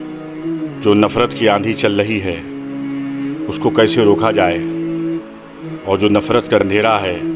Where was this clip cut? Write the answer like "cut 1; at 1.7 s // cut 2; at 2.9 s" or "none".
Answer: cut 1; at 2.3 s // cut 2; at 3.6 s